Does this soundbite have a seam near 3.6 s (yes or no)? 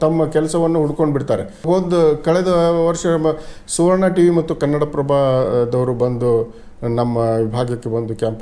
no